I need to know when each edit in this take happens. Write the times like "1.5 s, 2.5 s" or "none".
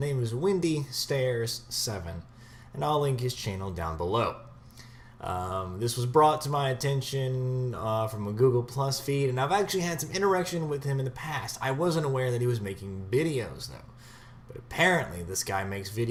none